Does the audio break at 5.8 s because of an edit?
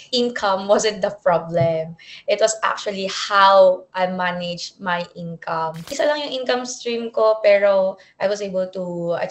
yes; 1 cut; at 5.8 s

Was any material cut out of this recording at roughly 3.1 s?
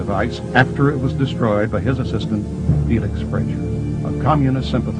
yes; 1 cut; at 3.1 s

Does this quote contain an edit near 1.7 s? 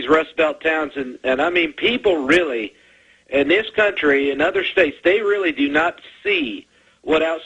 yes; 1 cut; at 1.7 s

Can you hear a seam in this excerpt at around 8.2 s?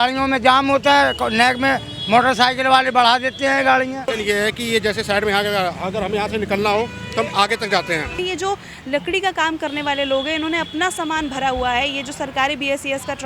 yes; 2 cuts; at 4.1 s, 8.2 s

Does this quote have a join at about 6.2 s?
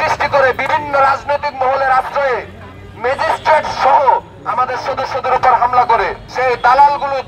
yes; 1 cut; at 6.2 s

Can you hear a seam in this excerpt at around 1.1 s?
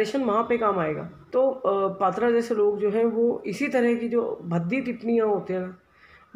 yes; 1 cut; at 1.1 s

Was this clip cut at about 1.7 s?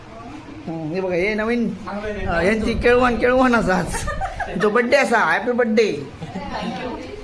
no; 0 cuts

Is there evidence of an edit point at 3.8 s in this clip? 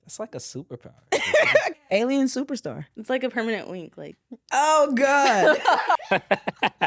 no; 2 cuts; at 1.8 s, 5.9 s

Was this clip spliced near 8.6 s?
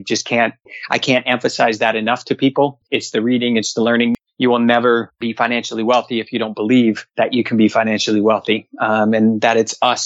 no; 4 cuts; at 2.8 s, 4.2 s, 5.2 s, 7.1 s

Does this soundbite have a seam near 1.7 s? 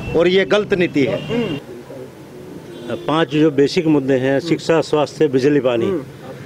yes; 1 cut; at 1.7 s

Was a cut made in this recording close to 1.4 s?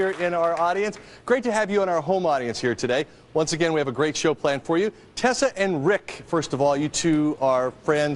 no; 1 cut; at 3.8 s

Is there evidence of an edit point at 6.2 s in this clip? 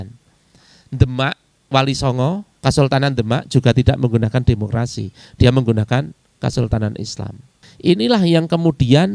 no; 2 cuts; at 2.5 s, 7.5 s

